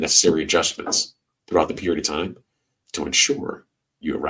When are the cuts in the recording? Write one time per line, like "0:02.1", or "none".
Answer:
none